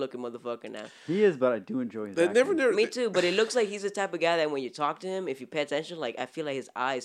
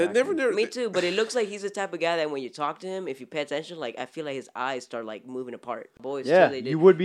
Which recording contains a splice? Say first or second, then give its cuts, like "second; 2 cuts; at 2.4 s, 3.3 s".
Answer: second; 1 cut; at 6.0 s